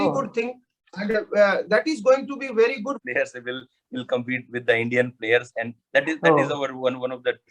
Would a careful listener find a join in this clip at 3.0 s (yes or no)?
yes